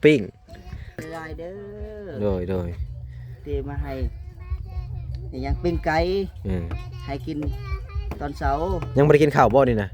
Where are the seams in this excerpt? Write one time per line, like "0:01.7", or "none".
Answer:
0:01.1